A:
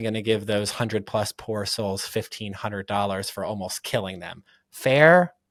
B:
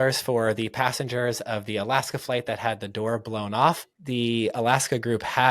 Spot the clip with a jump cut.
B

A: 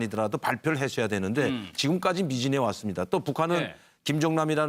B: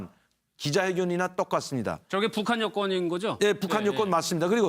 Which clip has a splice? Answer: B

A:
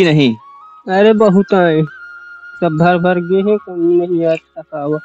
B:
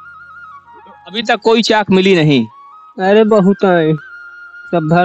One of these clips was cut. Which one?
B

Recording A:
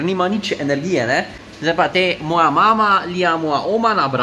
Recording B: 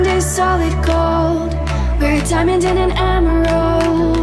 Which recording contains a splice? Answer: A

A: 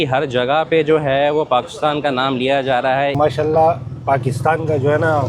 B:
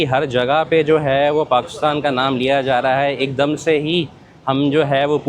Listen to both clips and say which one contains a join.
A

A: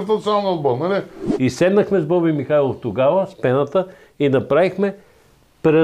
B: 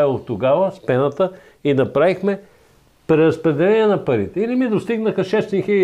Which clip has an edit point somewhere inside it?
A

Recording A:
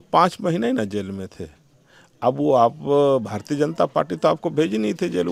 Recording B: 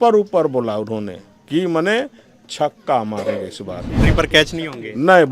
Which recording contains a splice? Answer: B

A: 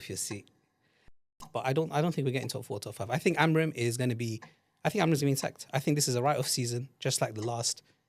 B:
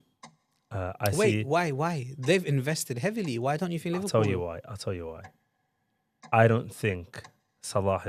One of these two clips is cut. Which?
A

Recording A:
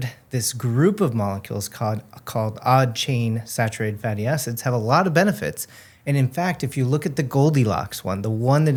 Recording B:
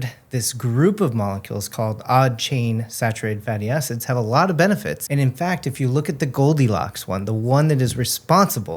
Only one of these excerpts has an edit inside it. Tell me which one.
B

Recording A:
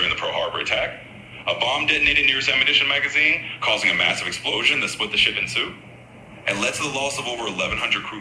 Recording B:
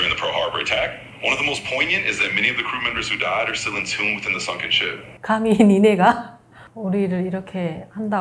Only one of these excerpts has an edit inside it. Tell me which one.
B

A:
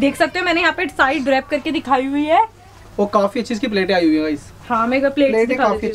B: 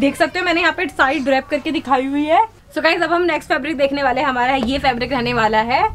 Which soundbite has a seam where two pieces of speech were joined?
B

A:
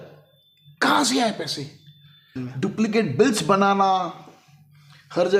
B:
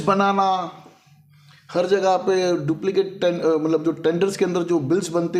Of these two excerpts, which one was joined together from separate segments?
A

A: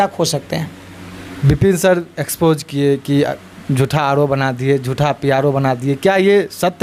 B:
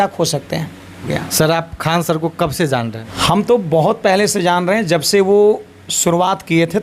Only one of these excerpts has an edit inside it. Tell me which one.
B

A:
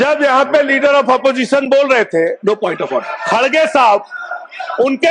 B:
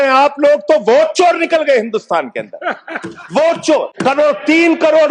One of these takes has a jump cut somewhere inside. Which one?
B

